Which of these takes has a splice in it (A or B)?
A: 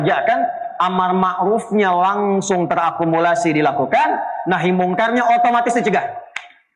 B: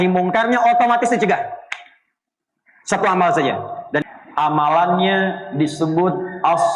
B